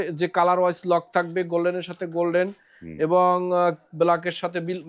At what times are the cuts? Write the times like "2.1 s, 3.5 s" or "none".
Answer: none